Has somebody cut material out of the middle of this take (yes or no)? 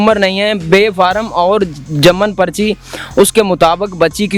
no